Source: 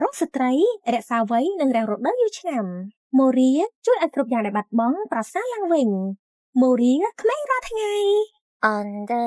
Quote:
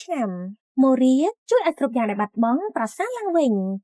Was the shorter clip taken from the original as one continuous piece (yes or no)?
yes